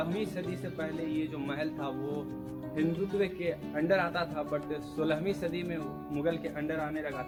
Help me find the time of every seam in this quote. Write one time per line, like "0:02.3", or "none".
none